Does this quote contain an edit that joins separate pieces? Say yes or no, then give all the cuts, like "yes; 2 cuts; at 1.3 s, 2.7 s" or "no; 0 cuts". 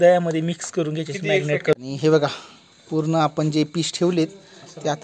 yes; 1 cut; at 1.8 s